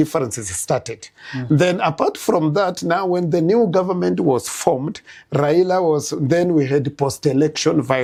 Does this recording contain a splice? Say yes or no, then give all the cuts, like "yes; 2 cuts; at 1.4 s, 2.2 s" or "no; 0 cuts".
no; 0 cuts